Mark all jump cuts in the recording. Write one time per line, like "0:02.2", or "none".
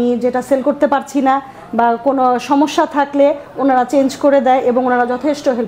none